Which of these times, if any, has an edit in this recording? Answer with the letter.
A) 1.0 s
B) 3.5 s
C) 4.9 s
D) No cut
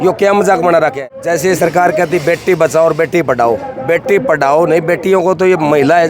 A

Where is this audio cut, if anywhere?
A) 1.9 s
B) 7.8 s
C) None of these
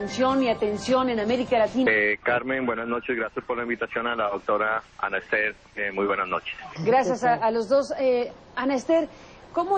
C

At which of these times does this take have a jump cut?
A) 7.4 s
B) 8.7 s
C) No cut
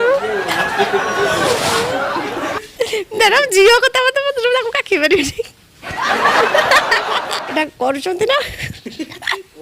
A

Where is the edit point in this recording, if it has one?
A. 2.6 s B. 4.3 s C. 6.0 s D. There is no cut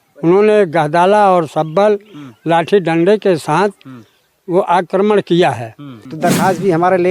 C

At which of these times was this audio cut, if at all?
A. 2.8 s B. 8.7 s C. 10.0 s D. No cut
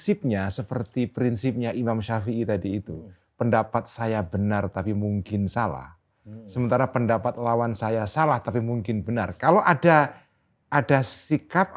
D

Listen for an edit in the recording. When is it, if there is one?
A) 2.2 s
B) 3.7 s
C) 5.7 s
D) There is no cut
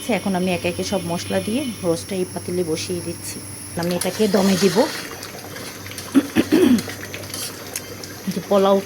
B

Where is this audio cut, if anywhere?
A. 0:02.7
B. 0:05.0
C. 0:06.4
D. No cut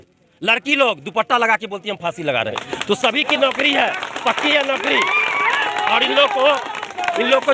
A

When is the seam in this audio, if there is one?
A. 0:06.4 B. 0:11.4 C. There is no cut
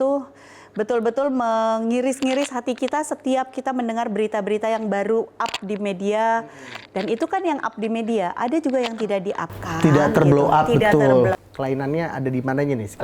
B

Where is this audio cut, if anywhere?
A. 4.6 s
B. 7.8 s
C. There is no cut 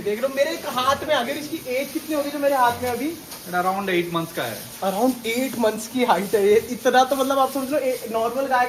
C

